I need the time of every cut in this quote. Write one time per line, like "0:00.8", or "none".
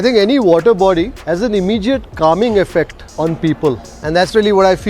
0:01.2
0:03.0
0:03.9